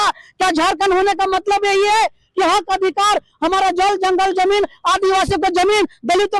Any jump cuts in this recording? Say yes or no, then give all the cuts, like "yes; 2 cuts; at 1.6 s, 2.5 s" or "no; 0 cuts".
no; 0 cuts